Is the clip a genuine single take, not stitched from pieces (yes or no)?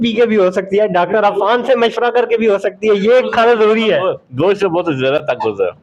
yes